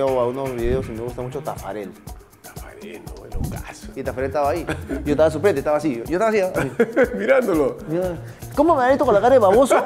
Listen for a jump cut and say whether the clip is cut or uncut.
cut